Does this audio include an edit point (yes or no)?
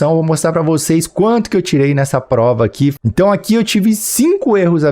yes